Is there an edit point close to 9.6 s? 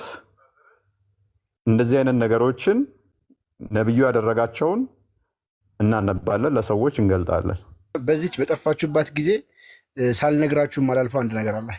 no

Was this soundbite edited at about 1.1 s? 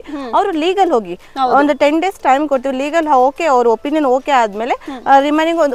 no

